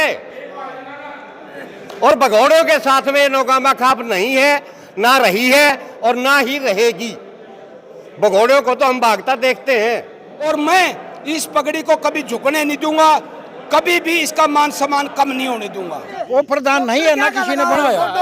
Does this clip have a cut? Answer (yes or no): yes